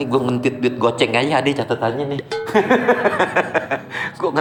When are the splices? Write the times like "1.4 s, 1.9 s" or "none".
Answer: none